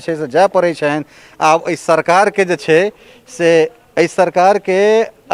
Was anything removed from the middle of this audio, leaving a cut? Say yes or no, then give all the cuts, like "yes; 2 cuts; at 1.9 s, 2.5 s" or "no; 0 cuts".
no; 0 cuts